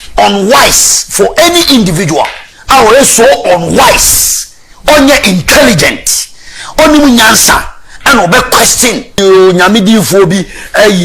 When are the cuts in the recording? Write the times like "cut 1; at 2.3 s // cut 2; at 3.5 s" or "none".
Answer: cut 1; at 9.2 s

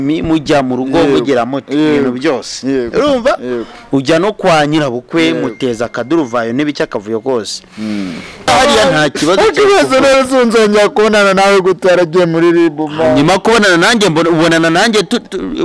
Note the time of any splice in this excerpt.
cut 1; at 8.5 s

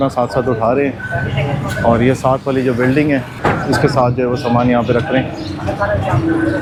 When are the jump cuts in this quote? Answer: none

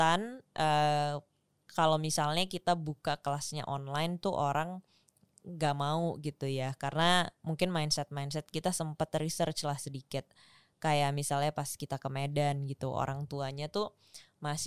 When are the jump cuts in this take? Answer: none

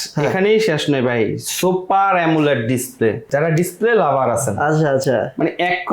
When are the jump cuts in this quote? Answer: cut 1; at 3.3 s

